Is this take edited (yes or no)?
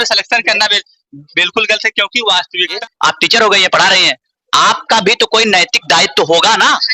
yes